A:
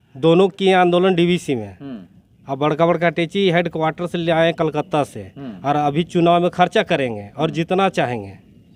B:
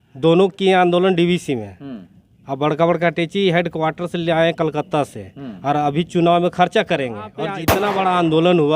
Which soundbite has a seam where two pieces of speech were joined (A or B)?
B